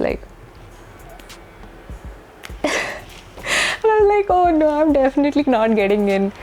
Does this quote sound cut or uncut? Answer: uncut